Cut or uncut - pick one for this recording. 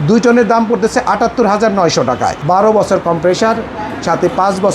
cut